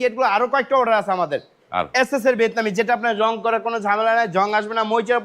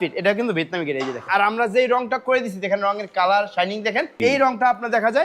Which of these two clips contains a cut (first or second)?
second